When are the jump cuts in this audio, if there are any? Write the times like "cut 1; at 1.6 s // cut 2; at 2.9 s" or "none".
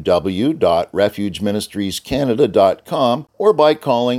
cut 1; at 3.3 s

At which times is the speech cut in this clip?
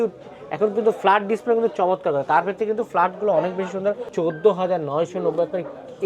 cut 1; at 4.0 s

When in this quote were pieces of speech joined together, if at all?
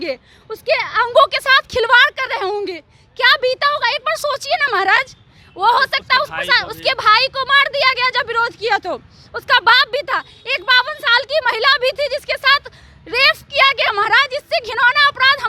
none

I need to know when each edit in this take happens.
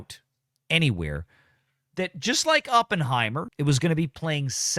none

